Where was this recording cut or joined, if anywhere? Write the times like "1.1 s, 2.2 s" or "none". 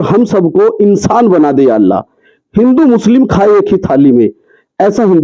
none